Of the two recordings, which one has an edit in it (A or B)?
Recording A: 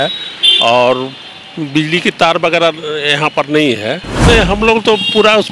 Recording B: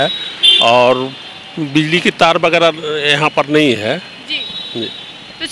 A